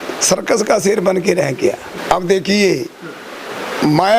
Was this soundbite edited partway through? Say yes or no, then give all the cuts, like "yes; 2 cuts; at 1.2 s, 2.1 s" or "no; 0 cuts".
yes; 1 cut; at 1.9 s